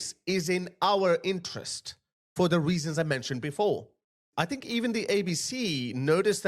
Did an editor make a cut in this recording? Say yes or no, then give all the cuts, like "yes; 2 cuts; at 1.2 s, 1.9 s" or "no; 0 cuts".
yes; 1 cut; at 4.2 s